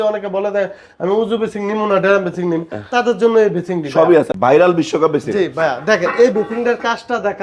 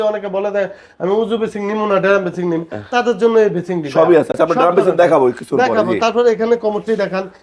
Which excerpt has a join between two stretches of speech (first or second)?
first